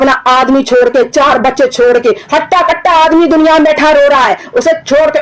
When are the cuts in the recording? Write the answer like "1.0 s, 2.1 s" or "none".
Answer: none